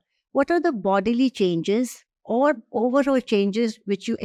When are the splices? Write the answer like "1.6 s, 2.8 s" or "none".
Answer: none